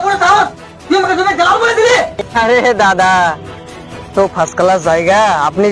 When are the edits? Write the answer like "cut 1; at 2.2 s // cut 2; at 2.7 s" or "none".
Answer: cut 1; at 2.2 s